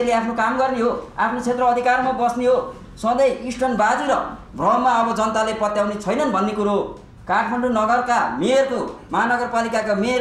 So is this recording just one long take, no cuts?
yes; 0 cuts

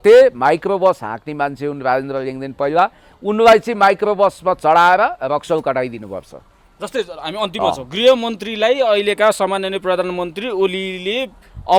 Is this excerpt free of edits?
yes; 0 cuts

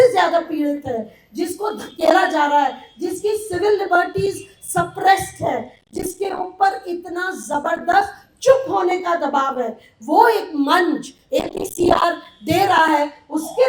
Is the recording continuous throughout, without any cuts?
yes; 0 cuts

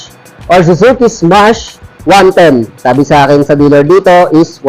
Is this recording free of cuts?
no; 1 cut; at 2.7 s

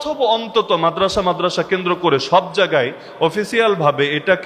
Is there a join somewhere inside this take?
no; 0 cuts

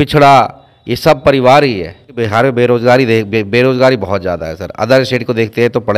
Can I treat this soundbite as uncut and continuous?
no; 1 cut; at 2.2 s

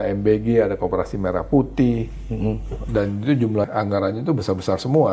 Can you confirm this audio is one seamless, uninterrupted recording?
no; 1 cut; at 3.7 s

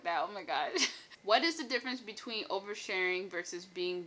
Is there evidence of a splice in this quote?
yes; 1 cut; at 1.2 s

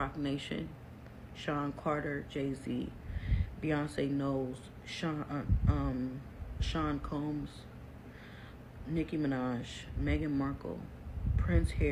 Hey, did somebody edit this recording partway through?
no; 0 cuts

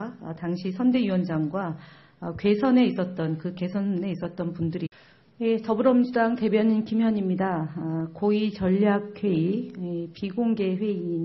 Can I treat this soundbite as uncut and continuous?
yes; 0 cuts

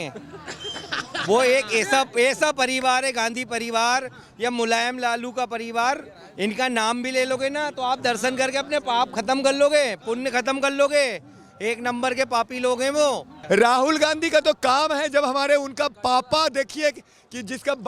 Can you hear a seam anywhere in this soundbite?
yes; 1 cut; at 13.3 s

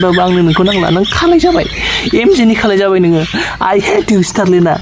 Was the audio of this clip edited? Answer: no; 0 cuts

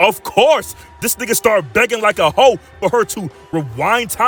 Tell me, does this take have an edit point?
no; 0 cuts

